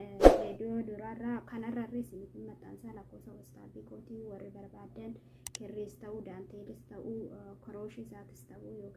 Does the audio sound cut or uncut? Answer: cut